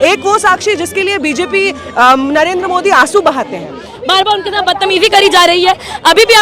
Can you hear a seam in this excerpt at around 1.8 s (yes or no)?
no